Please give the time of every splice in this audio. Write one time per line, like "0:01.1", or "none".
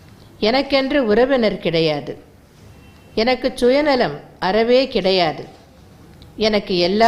none